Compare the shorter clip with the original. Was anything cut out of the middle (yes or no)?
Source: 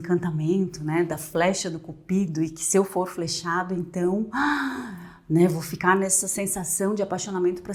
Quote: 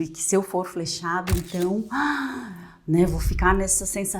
no